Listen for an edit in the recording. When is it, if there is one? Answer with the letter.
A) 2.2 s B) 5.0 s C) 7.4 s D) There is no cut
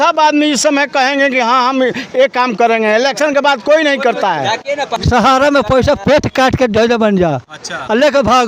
B